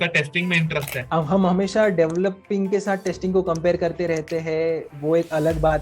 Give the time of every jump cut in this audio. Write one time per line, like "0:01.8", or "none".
0:01.0